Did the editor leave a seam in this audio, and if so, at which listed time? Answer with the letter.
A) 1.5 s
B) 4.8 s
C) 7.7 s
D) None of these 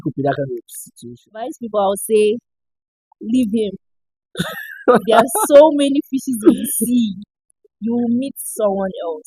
A